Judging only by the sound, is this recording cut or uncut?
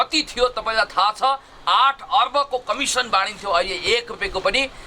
uncut